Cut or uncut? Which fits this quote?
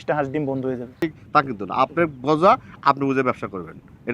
cut